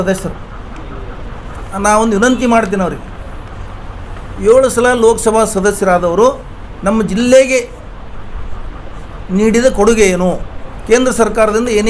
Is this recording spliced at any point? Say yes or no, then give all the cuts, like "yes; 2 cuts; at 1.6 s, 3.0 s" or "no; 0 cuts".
yes; 1 cut; at 1.6 s